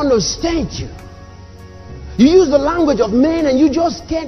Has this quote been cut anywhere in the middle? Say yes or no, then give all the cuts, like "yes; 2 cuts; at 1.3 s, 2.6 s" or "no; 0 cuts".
no; 0 cuts